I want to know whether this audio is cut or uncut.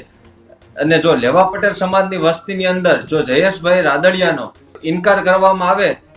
cut